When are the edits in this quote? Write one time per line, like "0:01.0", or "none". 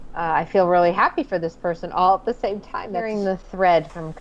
0:03.0